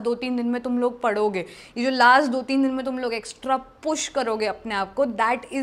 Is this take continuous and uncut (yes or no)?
yes